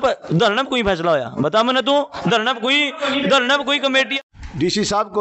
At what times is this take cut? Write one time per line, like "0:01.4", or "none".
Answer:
0:04.1